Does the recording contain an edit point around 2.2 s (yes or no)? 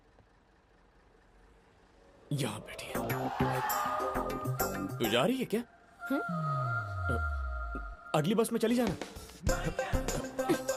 no